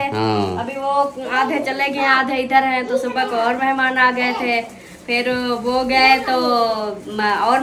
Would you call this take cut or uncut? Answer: uncut